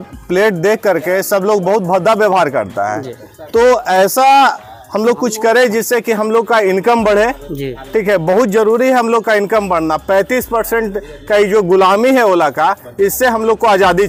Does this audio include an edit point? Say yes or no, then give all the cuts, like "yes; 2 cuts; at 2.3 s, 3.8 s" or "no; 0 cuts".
no; 0 cuts